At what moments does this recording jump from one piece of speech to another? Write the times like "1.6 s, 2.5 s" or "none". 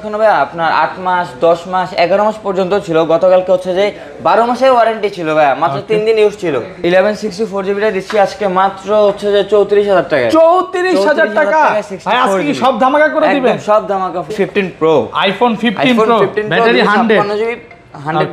6.7 s, 14.3 s